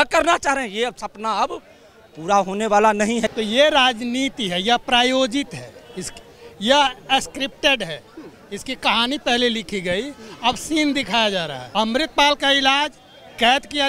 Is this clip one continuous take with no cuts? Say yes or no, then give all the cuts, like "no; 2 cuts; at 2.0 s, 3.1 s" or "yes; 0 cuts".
no; 2 cuts; at 3.3 s, 11.6 s